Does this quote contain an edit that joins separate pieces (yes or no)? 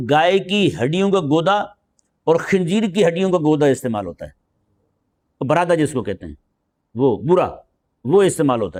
no